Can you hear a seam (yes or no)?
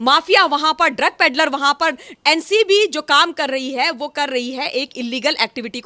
yes